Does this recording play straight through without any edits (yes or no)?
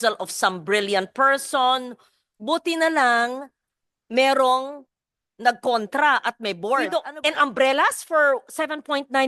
no